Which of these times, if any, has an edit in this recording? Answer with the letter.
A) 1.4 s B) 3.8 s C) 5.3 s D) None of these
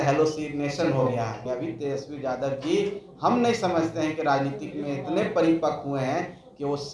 A